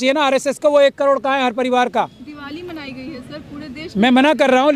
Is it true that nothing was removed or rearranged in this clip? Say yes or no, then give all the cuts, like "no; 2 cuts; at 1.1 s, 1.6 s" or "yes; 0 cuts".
yes; 0 cuts